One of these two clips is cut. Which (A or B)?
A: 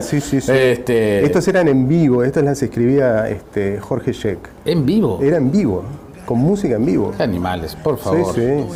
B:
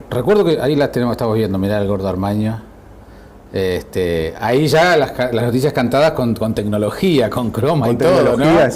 B